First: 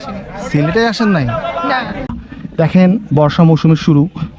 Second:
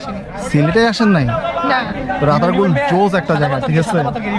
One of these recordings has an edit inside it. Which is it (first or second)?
first